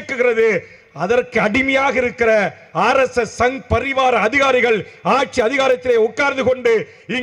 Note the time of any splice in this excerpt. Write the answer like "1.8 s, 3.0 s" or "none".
none